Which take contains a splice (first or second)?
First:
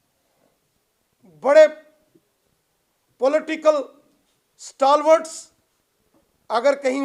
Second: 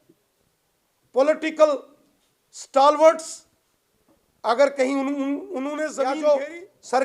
second